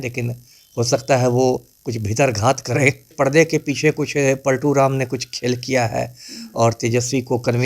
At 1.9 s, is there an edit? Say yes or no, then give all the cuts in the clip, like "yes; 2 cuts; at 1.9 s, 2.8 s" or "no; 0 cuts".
no; 1 cut; at 3.1 s